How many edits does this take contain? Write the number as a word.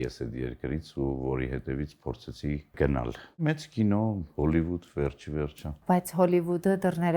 two